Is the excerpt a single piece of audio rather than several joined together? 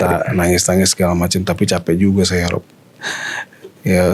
yes; 0 cuts

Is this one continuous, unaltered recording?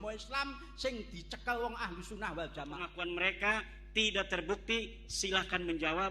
no; 1 cut; at 2.9 s

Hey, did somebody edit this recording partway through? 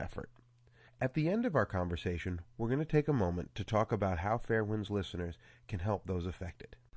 no; 0 cuts

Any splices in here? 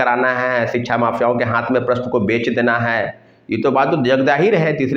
no; 0 cuts

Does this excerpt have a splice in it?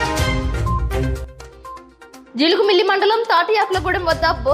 yes; 1 cut; at 1.8 s

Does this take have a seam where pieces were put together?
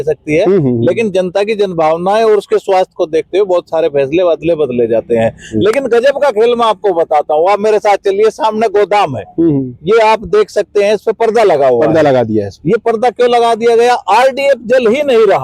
no; 0 cuts

